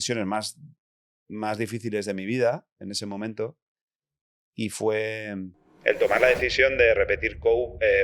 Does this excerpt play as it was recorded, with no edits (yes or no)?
yes